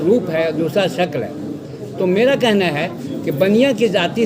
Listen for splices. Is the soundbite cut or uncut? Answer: uncut